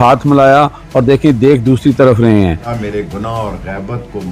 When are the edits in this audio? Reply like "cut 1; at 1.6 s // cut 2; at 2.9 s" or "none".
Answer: cut 1; at 2.7 s